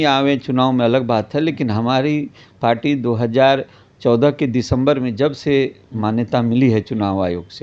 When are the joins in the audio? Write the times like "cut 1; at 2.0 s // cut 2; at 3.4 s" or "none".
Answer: none